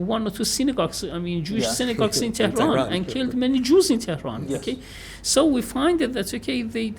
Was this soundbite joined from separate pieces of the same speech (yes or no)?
no